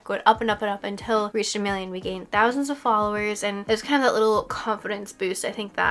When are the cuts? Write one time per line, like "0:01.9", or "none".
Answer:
none